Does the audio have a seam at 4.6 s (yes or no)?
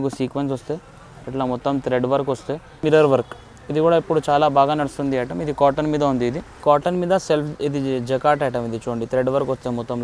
no